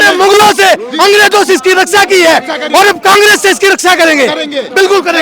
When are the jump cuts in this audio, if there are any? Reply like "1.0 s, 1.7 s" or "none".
none

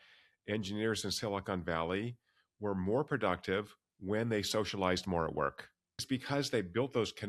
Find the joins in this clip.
6.0 s

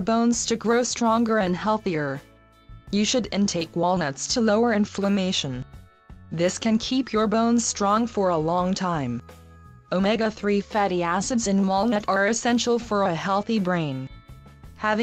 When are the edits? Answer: 13.8 s

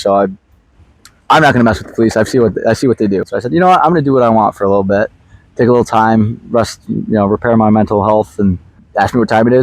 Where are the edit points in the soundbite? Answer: 3.3 s, 8.5 s

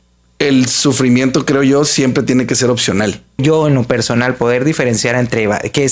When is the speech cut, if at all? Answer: 3.4 s

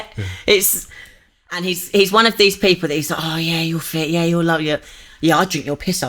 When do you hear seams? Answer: 1.7 s

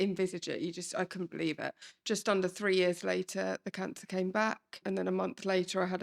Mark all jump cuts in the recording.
1.9 s, 4.8 s

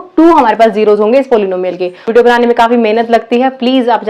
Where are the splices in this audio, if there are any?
2.2 s

